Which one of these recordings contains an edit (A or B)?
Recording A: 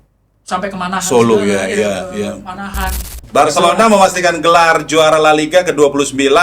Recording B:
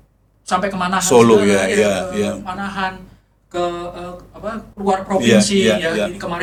A